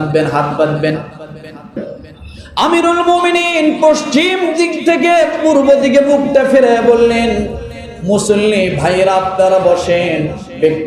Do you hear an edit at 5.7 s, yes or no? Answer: no